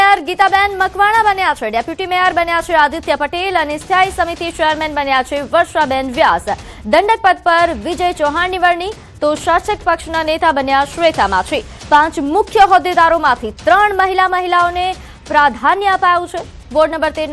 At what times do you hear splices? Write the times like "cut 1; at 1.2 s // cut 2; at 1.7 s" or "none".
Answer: cut 1; at 2.5 s